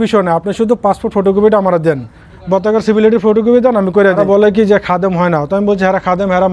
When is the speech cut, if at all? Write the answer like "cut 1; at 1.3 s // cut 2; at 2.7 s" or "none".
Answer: cut 1; at 4.2 s